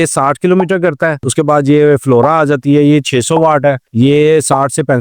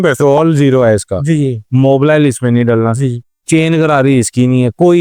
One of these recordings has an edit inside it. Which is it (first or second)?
first